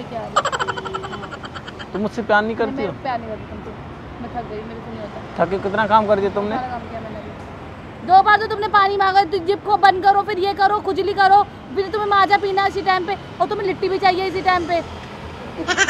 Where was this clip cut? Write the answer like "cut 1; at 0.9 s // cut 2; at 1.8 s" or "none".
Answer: none